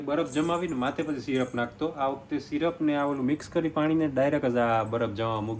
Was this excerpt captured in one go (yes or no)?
yes